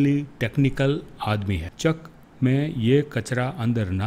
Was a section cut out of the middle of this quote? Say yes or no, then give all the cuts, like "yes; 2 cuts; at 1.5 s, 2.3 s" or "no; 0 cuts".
yes; 1 cut; at 1.7 s